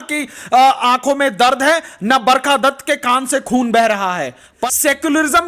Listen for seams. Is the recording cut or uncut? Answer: cut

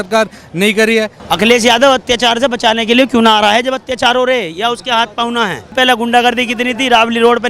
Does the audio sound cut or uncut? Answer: cut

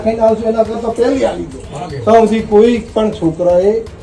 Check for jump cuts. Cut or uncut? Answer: cut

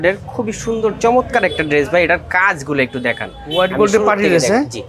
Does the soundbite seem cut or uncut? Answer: uncut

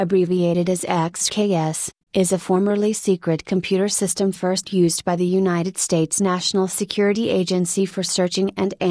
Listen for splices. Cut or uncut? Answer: uncut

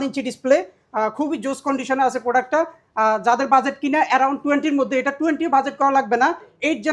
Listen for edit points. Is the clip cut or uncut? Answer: uncut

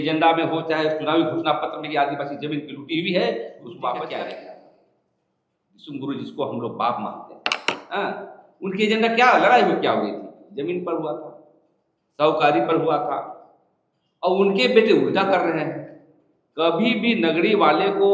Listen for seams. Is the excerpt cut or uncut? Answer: cut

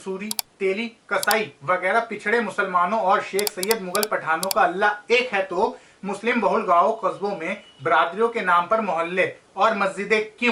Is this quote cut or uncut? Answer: uncut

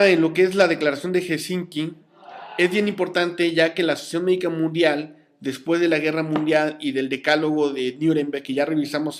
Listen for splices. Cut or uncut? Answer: uncut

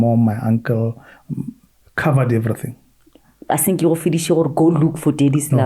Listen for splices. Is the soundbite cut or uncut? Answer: uncut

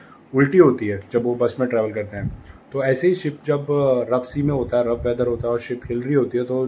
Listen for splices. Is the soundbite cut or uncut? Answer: uncut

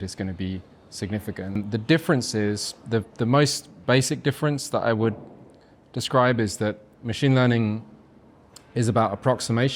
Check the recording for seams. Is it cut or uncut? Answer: cut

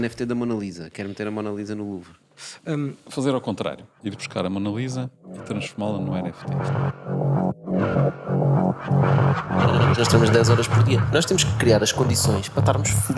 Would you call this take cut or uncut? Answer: cut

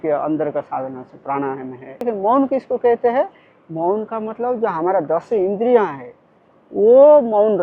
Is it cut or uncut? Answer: cut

